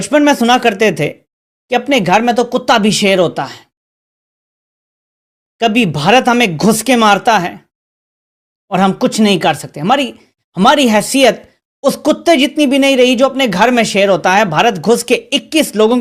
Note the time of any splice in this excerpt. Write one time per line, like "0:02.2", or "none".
none